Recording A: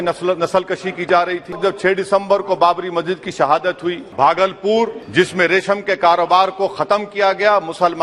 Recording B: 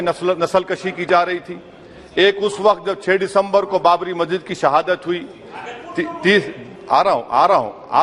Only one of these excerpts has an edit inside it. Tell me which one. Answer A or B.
A